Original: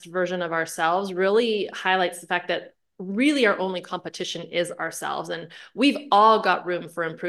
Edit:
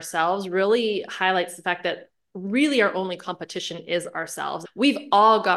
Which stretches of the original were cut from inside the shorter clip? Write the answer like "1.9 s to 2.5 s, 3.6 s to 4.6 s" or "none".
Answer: 5.3 s to 5.6 s